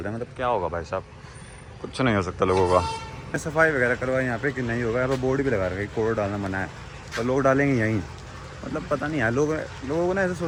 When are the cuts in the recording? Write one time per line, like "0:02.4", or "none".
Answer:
none